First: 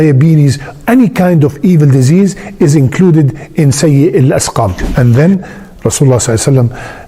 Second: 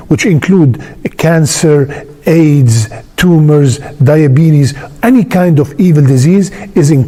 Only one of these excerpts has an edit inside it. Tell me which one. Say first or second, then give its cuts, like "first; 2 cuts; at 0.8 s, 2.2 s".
first; 1 cut; at 5.0 s